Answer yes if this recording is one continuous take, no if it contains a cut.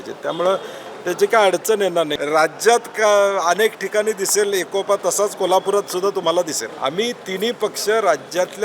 no